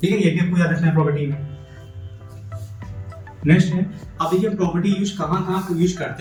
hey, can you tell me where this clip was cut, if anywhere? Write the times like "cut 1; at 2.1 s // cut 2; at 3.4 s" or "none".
none